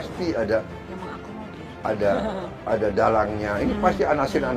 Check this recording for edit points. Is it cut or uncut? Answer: uncut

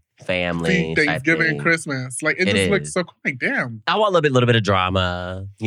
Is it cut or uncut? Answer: cut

